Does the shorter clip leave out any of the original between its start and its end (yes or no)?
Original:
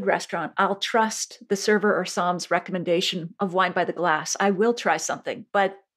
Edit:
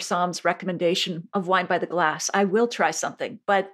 no